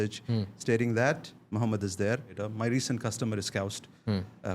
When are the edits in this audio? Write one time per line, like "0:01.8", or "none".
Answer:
0:02.4